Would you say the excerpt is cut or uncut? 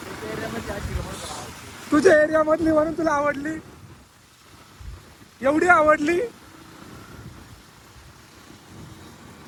uncut